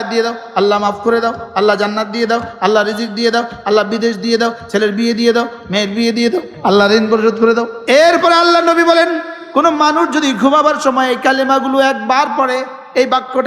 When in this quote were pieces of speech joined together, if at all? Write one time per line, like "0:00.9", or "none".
0:06.5
0:07.7